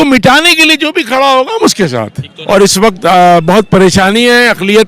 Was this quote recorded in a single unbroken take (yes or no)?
no